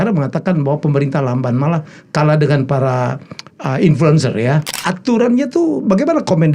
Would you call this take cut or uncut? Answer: cut